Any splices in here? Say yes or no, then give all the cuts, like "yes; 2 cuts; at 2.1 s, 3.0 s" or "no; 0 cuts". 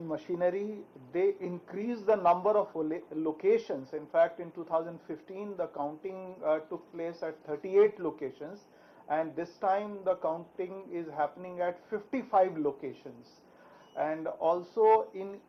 no; 0 cuts